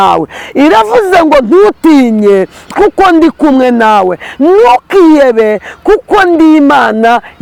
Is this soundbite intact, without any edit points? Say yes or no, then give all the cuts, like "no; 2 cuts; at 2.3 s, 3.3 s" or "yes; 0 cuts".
yes; 0 cuts